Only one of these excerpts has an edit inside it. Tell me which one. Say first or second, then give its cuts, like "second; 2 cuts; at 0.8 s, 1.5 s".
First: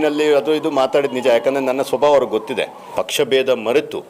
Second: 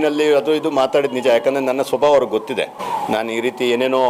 first; 1 cut; at 2.8 s